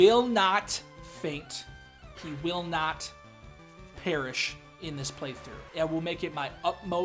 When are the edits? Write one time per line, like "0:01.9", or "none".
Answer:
0:05.5